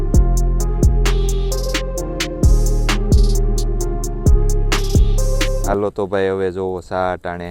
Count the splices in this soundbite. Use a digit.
0